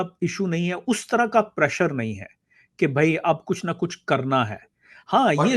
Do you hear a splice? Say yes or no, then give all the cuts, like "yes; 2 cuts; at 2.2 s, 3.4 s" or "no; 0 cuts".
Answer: no; 0 cuts